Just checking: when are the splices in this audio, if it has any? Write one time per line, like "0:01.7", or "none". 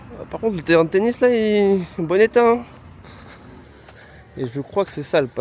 0:03.6